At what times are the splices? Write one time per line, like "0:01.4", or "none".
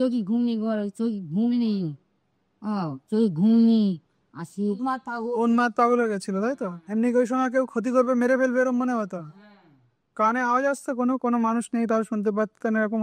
none